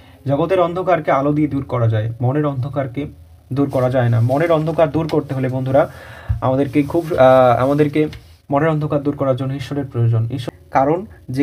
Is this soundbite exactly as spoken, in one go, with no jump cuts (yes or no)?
no